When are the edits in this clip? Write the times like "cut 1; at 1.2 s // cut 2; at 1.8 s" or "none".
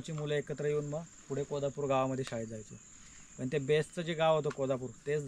none

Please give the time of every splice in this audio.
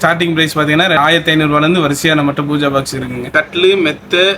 cut 1; at 1.0 s // cut 2; at 3.3 s

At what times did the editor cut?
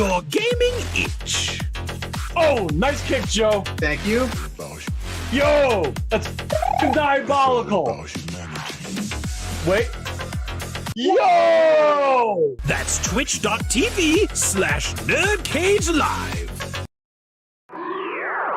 cut 1; at 17.5 s

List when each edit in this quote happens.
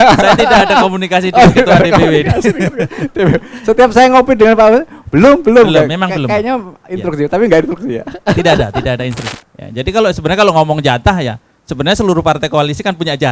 cut 1; at 9.3 s

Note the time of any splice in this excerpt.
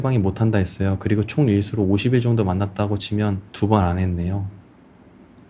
none

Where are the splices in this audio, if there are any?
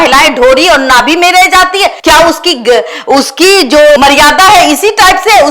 none

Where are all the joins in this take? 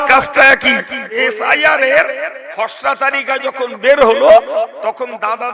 cut 1; at 1.2 s

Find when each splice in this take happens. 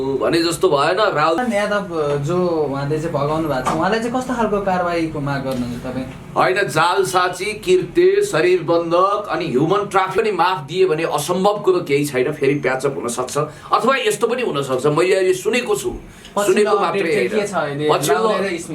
cut 1; at 1.4 s // cut 2; at 10.2 s

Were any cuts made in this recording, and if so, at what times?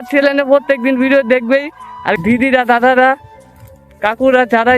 cut 1; at 2.2 s

